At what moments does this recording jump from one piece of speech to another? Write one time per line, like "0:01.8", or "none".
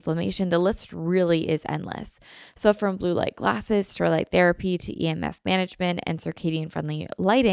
none